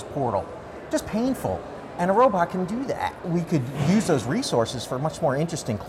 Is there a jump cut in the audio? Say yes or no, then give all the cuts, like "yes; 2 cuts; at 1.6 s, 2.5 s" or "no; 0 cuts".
yes; 1 cut; at 3.2 s